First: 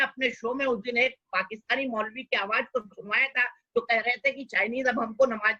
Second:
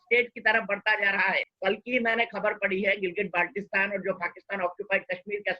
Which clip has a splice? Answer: second; 1 cut; at 1.5 s

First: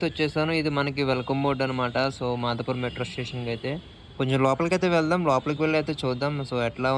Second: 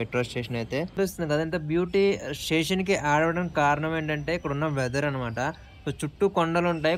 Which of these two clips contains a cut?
second; 1 cut; at 0.9 s

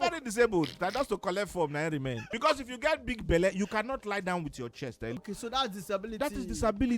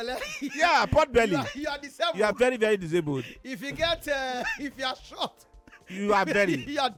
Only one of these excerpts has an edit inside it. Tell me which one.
first; 2 cuts; at 2.2 s, 5.2 s

